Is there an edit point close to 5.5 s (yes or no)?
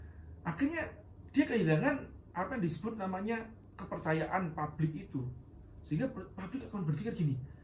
no